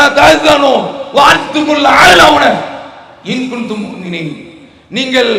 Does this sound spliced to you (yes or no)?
no